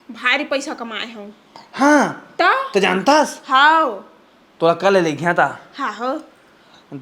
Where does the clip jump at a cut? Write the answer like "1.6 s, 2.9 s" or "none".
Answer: none